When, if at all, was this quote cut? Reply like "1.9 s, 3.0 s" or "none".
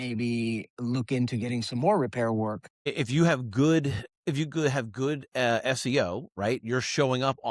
2.7 s